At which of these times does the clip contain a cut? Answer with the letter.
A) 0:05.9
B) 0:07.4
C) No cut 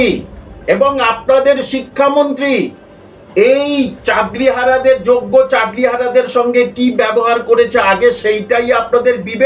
C